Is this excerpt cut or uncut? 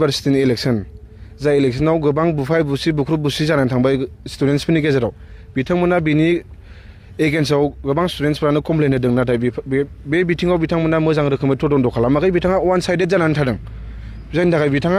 uncut